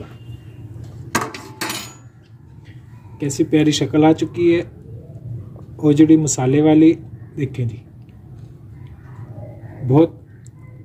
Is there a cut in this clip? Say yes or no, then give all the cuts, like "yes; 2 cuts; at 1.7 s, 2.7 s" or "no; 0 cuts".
no; 0 cuts